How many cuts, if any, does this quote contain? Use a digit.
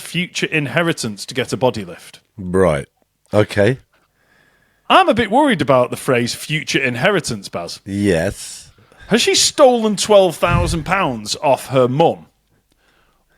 0